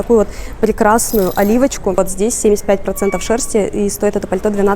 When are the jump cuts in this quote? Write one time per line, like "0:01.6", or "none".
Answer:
0:02.0